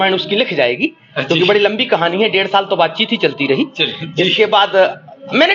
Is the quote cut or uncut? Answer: uncut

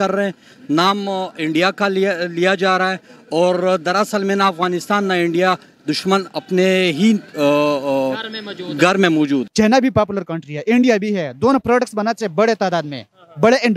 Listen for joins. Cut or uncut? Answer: cut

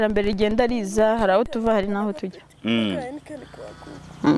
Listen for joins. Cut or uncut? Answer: uncut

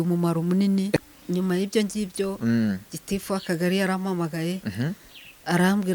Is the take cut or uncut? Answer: cut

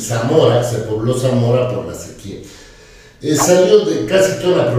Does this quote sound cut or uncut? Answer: uncut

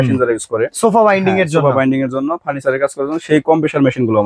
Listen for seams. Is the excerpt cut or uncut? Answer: uncut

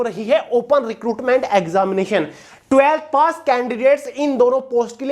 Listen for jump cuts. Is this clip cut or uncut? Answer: cut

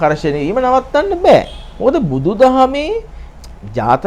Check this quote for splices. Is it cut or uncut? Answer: uncut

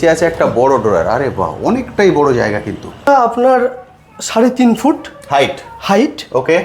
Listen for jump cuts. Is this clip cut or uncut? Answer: cut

